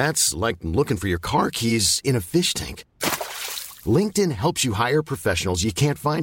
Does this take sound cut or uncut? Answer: uncut